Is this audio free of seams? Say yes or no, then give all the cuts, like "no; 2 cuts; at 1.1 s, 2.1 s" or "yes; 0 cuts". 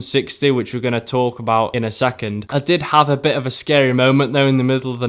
no; 1 cut; at 2.3 s